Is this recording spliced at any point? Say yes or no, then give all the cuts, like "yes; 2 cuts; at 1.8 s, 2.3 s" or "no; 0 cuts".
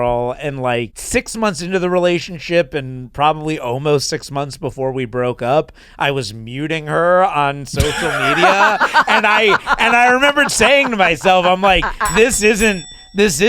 yes; 1 cut; at 1.0 s